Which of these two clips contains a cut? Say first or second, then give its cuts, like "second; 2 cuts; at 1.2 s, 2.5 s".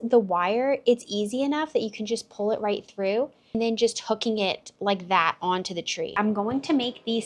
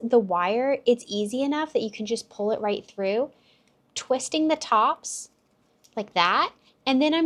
first; 2 cuts; at 3.6 s, 6.1 s